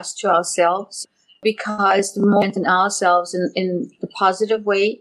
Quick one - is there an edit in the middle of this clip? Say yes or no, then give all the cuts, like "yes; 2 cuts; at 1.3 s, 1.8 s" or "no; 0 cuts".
yes; 1 cut; at 1.0 s